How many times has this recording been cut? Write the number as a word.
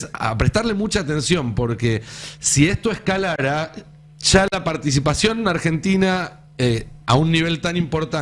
zero